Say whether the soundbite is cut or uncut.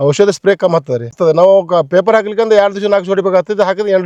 cut